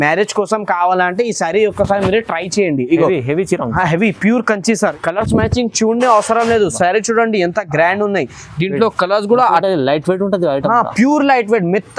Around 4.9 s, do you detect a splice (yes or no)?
yes